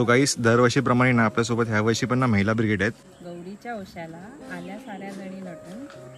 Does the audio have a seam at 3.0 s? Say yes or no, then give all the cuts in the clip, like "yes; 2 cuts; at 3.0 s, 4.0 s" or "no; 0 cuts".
yes; 1 cut; at 3.0 s